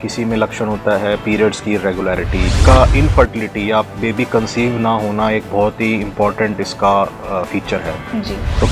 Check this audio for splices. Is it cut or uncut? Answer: cut